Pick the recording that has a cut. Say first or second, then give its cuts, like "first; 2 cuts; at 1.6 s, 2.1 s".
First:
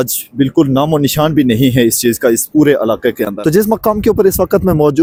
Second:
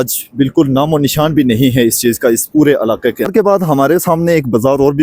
second; 1 cut; at 3.3 s